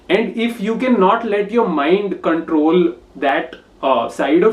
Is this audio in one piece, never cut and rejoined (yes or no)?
yes